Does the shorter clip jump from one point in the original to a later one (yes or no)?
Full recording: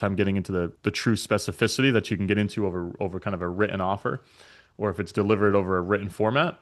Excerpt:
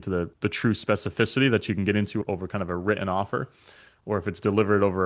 yes